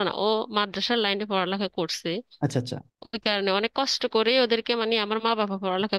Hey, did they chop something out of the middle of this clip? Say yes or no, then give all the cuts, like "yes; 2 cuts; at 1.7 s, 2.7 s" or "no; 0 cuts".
no; 0 cuts